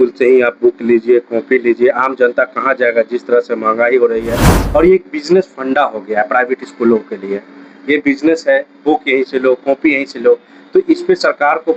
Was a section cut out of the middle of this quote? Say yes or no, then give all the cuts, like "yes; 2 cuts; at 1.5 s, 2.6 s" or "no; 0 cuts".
yes; 1 cut; at 4.6 s